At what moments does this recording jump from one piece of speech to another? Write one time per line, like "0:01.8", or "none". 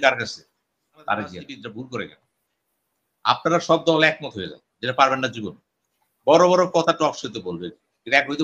0:01.5